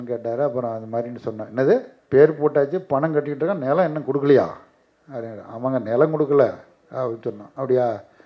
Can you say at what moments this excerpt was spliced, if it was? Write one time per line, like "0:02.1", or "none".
0:02.0